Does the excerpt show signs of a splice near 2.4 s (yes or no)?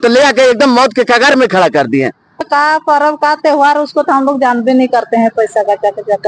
yes